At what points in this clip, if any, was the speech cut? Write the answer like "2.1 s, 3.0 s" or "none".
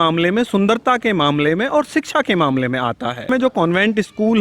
3.3 s